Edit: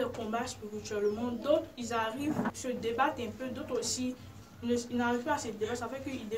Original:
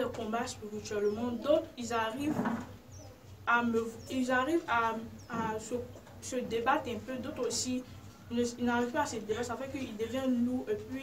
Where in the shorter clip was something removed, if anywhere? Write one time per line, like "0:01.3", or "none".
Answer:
0:02.5